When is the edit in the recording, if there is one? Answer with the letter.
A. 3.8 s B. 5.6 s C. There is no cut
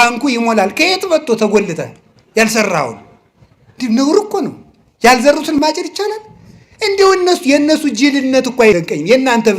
B